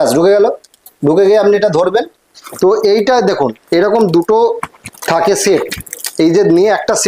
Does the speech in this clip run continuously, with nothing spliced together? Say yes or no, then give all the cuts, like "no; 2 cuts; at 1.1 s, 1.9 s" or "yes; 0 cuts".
no; 1 cut; at 2.4 s